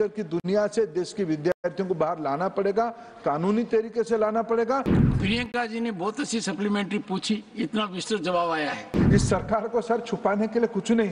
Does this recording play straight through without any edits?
no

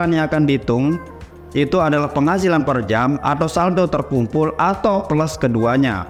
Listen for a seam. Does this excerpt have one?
no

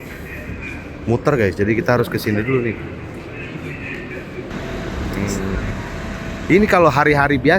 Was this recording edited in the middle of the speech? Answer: yes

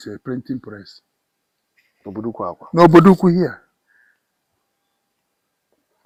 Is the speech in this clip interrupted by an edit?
no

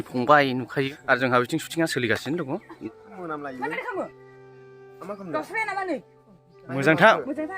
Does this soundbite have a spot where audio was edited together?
yes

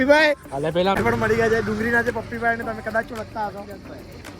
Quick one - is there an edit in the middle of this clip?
yes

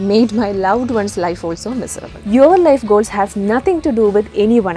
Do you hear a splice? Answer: yes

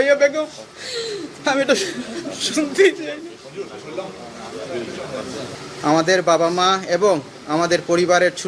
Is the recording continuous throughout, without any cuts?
no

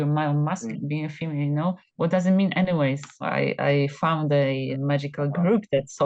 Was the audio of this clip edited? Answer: yes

